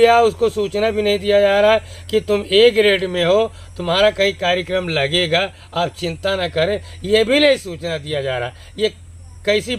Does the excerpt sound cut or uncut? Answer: uncut